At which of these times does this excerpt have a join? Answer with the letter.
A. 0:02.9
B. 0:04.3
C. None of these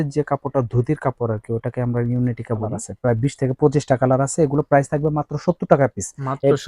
A